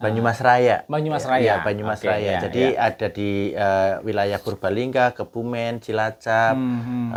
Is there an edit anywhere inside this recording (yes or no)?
no